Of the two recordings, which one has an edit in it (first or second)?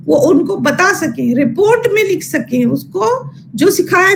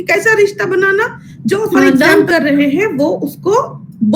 second